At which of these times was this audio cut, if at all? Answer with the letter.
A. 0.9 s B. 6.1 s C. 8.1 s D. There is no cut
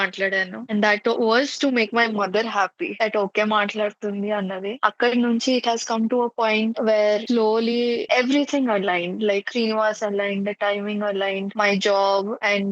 C